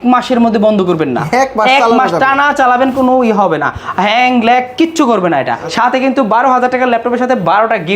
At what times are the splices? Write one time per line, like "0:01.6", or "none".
0:05.6